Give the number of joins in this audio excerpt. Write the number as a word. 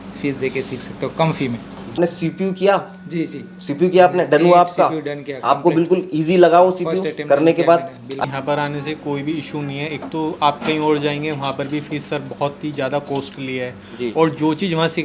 two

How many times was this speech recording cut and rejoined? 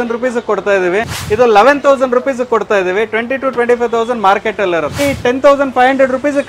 two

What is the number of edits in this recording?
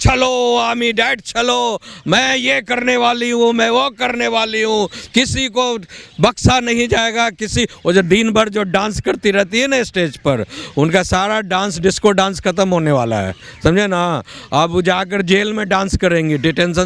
zero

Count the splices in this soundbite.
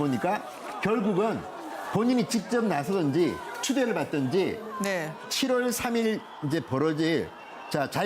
one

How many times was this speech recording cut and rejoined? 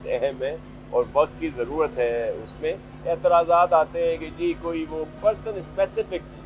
two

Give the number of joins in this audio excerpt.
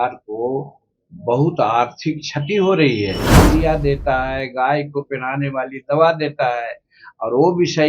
one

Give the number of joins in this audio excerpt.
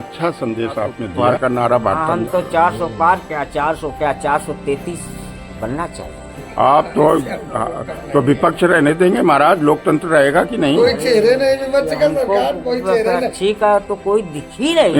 one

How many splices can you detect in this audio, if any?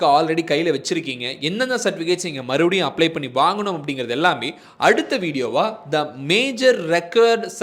zero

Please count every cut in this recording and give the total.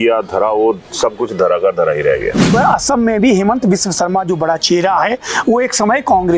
one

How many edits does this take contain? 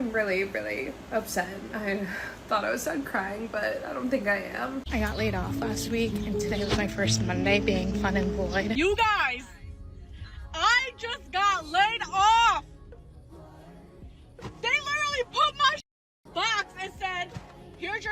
two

